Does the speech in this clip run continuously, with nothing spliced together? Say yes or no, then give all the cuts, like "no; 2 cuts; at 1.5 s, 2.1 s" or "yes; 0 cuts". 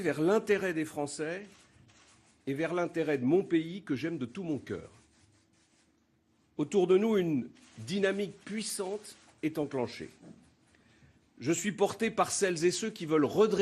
no; 1 cut; at 1.6 s